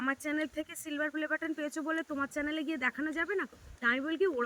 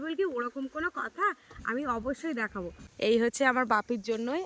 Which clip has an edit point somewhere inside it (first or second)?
second